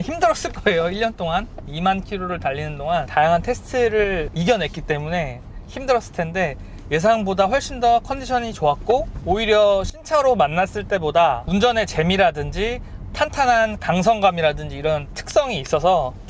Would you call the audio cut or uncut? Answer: uncut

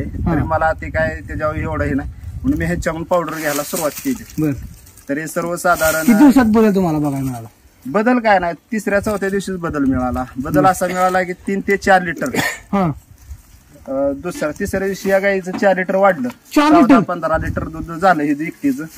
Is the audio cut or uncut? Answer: uncut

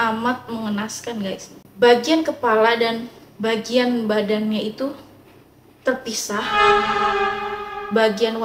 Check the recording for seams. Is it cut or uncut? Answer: cut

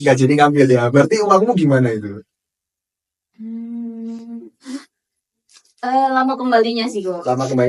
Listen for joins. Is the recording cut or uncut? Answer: uncut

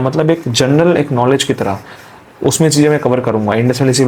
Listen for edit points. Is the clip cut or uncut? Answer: uncut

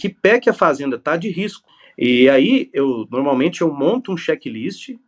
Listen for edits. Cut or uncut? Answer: cut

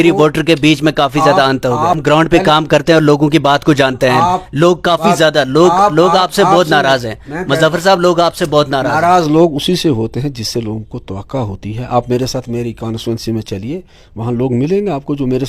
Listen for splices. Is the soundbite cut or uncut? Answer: cut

